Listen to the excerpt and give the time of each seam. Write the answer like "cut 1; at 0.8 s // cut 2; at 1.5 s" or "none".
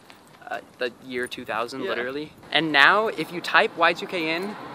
cut 1; at 2.4 s